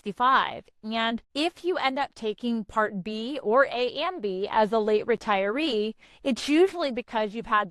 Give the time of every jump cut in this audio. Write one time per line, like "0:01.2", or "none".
0:01.3